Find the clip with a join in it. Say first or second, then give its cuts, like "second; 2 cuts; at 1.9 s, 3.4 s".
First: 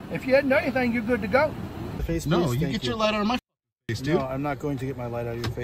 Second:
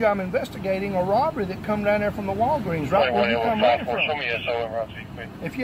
first; 1 cut; at 2.0 s